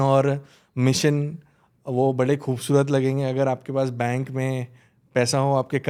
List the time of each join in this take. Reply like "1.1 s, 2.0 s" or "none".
none